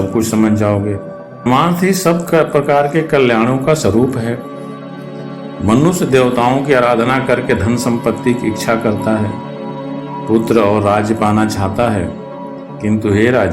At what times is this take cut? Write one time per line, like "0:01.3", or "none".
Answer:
0:01.5